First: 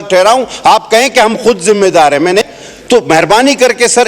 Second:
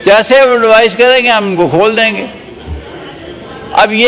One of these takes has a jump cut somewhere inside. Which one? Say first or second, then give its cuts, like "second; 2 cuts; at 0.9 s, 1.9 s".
first; 1 cut; at 2.5 s